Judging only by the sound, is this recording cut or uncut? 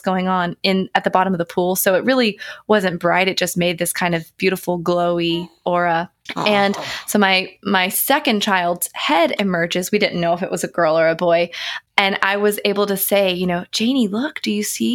cut